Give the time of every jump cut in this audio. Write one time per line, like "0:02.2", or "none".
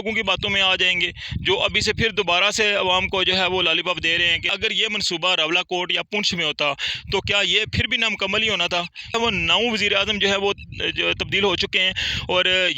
0:04.5
0:09.1